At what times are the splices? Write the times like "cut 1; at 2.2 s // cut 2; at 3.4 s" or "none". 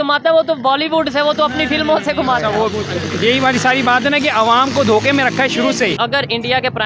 cut 1; at 6.0 s